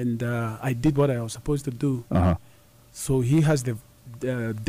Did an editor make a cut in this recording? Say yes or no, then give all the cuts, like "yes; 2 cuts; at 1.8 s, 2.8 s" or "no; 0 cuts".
no; 0 cuts